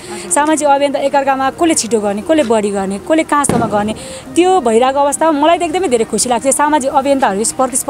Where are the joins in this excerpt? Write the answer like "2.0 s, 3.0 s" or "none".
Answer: none

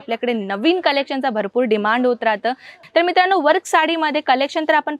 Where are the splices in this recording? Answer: 2.8 s

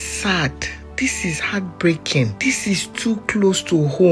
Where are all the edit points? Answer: 2.3 s

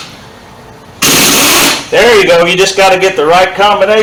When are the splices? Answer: none

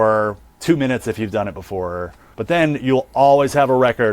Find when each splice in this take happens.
2.2 s

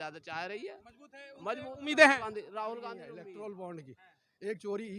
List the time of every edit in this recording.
3.0 s

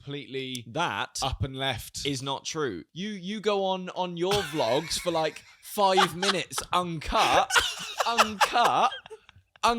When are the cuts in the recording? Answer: 2.9 s

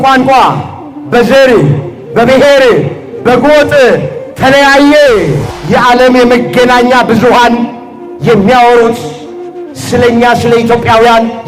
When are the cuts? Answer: 5.5 s

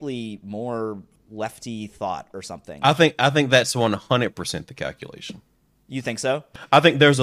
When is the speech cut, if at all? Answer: 1.2 s, 2.8 s

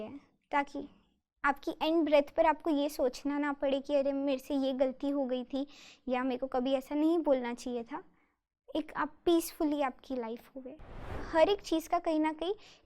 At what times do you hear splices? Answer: 11.1 s

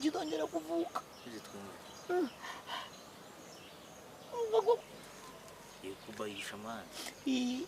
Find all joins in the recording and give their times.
4.8 s

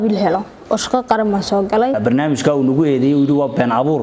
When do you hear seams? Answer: 2.0 s

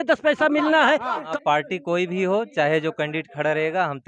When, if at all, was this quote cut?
1.2 s

